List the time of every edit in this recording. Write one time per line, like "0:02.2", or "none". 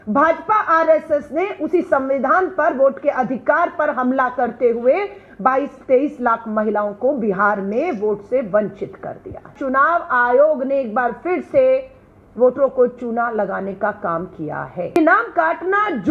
0:09.5
0:15.0